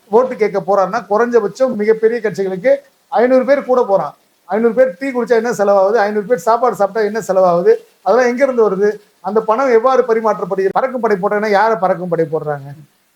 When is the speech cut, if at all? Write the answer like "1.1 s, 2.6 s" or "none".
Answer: 10.7 s